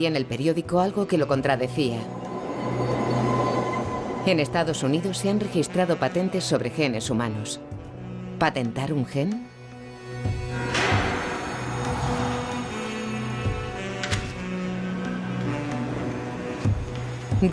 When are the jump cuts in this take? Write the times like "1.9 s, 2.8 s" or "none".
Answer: none